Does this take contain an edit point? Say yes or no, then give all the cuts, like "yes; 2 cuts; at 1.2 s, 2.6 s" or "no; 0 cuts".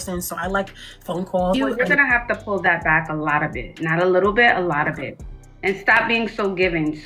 yes; 1 cut; at 1.5 s